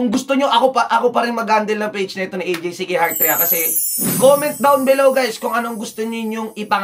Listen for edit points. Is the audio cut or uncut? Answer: uncut